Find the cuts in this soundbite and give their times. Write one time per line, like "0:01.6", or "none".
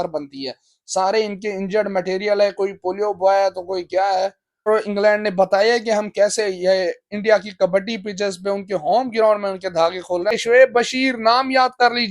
0:04.7
0:10.4